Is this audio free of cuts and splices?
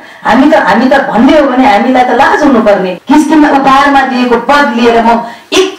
no; 1 cut; at 2.9 s

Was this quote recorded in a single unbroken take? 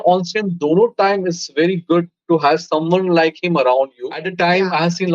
no; 1 cut; at 4.2 s

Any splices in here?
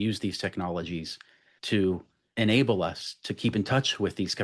yes; 1 cut; at 2.2 s

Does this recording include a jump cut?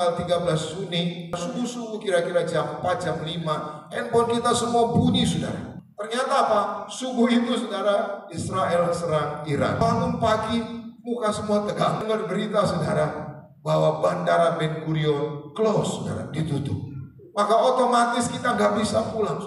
yes; 4 cuts; at 1.4 s, 5.7 s, 9.8 s, 12.0 s

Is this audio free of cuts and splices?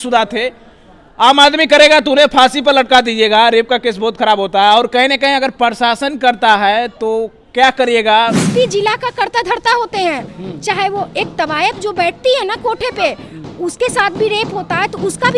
no; 1 cut; at 8.4 s

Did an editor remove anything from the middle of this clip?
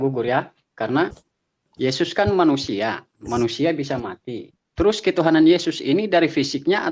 no; 0 cuts

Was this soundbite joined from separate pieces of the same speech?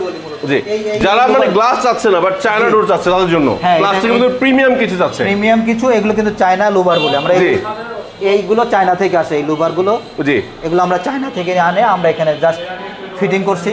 no; 0 cuts

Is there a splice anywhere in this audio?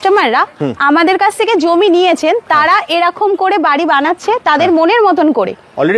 no; 0 cuts

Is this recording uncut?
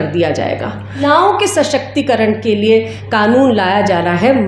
no; 1 cut; at 1.0 s

